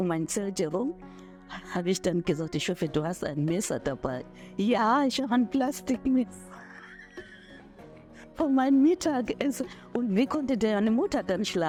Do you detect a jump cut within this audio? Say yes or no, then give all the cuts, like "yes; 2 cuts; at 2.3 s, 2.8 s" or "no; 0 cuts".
no; 0 cuts